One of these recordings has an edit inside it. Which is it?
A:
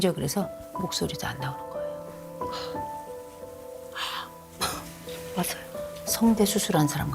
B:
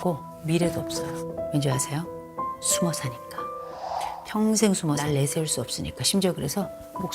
B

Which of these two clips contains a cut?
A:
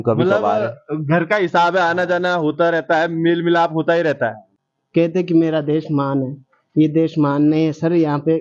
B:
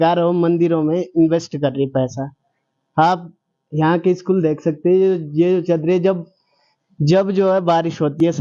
A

